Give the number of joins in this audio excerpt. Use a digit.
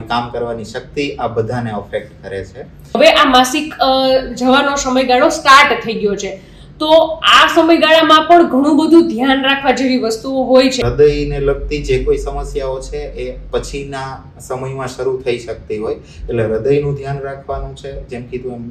2